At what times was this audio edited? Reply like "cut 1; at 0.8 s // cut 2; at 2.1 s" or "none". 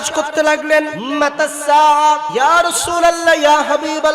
cut 1; at 1.0 s // cut 2; at 2.3 s